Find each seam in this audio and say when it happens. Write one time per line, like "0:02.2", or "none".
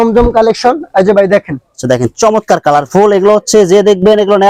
none